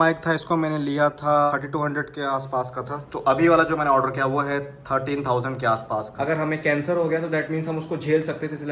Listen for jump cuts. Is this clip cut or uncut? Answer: cut